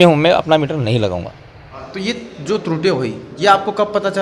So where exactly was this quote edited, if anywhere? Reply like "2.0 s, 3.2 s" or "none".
1.8 s